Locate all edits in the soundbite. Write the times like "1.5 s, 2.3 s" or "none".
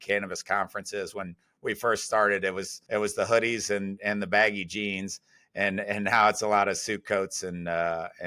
none